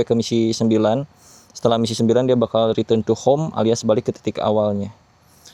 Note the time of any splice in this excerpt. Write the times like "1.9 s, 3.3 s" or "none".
none